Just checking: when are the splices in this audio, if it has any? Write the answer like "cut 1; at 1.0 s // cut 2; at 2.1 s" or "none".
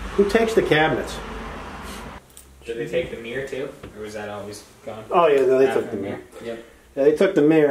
cut 1; at 2.3 s